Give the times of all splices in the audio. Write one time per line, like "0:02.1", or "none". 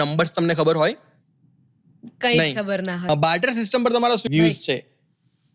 0:03.1
0:04.2